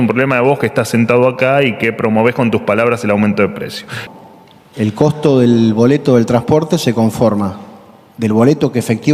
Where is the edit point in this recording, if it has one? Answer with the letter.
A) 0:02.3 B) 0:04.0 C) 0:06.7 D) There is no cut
B